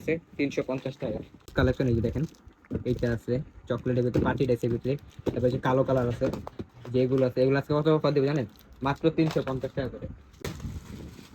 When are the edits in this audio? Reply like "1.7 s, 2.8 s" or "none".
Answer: 1.5 s, 10.4 s